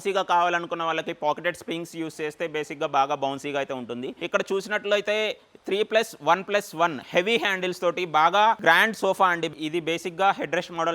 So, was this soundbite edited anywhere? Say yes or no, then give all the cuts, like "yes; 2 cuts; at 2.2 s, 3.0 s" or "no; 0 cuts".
yes; 2 cuts; at 4.1 s, 9.5 s